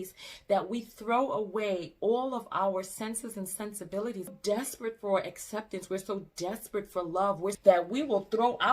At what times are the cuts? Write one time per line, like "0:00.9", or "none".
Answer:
0:04.3
0:07.6